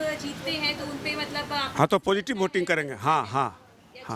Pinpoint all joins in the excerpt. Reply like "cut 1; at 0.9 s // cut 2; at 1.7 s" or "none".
none